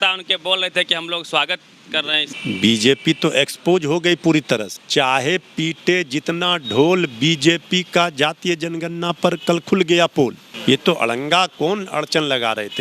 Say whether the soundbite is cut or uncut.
cut